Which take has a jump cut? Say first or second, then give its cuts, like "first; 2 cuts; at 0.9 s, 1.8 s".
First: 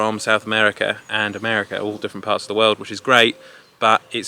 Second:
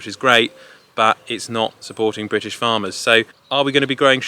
second; 1 cut; at 3.4 s